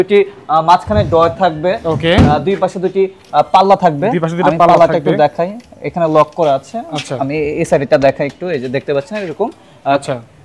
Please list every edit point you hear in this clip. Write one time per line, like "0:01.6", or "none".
none